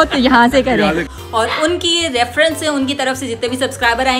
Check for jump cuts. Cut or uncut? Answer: cut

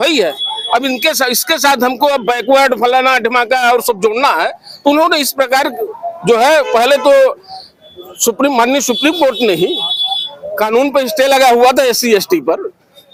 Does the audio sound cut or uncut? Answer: uncut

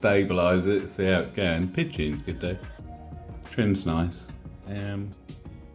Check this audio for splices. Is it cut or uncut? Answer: uncut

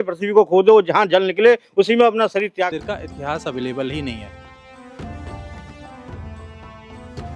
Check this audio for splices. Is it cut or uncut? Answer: uncut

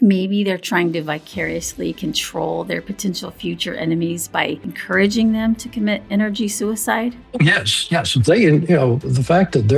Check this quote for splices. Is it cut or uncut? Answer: cut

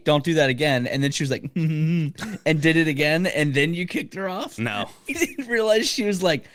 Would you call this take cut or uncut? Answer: uncut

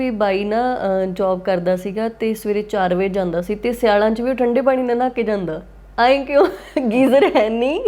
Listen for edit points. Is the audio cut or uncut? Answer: uncut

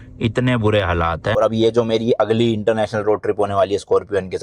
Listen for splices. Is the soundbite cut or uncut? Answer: cut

